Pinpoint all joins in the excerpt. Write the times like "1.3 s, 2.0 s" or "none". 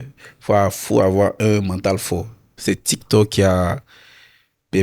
2.6 s

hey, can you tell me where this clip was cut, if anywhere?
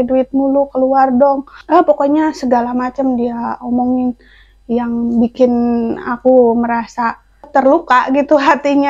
1.5 s, 7.3 s

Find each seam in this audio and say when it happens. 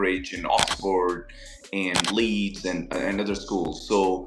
none

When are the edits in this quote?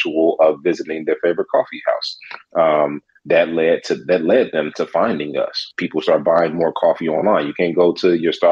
5.7 s

